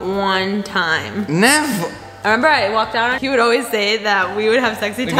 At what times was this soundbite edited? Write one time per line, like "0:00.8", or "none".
0:03.2